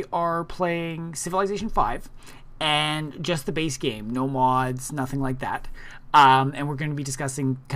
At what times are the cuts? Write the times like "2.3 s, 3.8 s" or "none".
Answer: 6.2 s